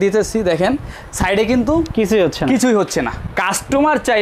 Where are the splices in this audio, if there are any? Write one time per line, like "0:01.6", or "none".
0:03.2